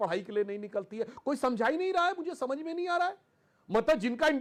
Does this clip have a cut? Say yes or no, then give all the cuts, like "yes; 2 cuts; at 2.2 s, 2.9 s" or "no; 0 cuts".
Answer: no; 0 cuts